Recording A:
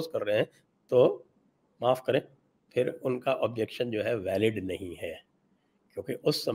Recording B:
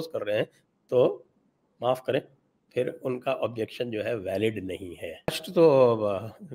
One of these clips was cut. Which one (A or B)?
B